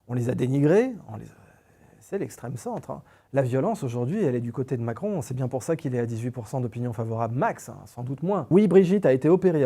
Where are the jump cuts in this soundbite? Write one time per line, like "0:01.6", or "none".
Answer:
0:08.4